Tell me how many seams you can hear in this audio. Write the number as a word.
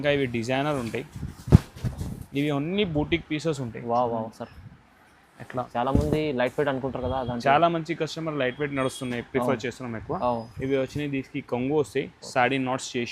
one